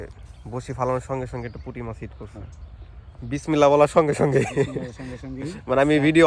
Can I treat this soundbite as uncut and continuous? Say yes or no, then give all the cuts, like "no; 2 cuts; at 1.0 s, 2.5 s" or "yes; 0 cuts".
yes; 0 cuts